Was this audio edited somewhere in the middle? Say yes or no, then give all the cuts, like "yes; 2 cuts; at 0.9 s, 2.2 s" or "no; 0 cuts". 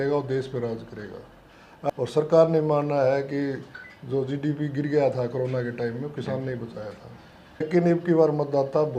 yes; 2 cuts; at 1.9 s, 7.7 s